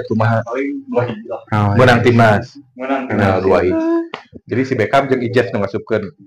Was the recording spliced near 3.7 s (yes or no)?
yes